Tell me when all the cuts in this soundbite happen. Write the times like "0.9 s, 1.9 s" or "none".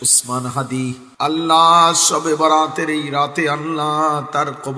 1.1 s